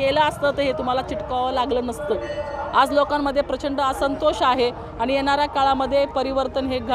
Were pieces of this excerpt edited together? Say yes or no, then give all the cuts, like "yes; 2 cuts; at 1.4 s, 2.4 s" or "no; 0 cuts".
no; 0 cuts